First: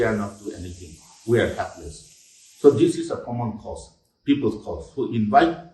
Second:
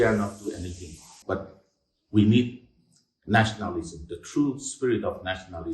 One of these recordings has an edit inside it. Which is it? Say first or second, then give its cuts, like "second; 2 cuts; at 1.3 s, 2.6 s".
second; 1 cut; at 1.1 s